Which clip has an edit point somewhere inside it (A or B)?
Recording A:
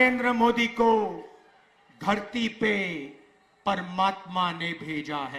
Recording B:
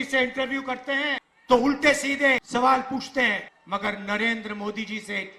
B